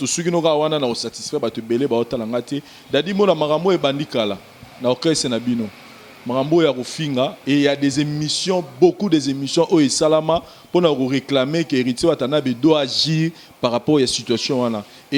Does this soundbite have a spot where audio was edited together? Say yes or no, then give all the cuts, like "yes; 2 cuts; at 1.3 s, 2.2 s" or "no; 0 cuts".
no; 0 cuts